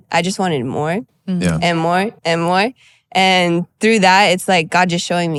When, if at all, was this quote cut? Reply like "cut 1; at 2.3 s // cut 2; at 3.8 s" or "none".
none

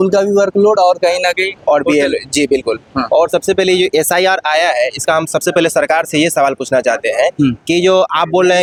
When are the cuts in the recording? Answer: none

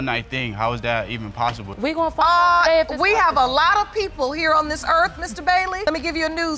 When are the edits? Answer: none

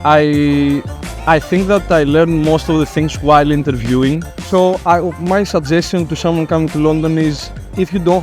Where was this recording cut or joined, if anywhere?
cut 1; at 4.4 s

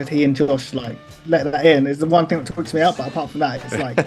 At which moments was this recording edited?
none

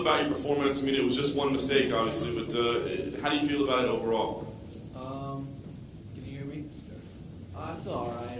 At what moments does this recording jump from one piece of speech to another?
cut 1; at 4.5 s

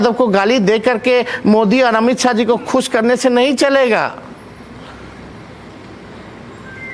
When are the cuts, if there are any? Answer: none

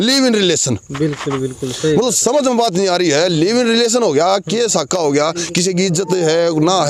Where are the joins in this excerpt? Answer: none

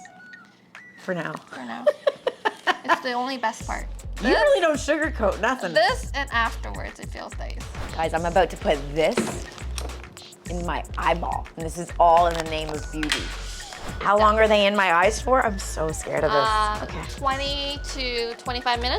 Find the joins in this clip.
cut 1; at 7.7 s // cut 2; at 11.5 s // cut 3; at 13.9 s

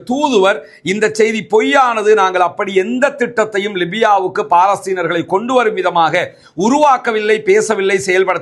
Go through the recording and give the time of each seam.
none

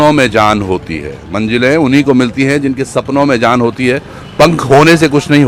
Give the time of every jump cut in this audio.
none

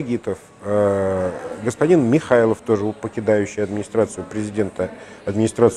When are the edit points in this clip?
none

